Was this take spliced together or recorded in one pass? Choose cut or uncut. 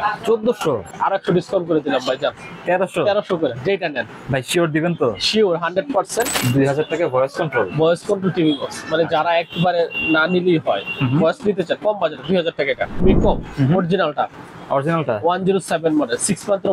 cut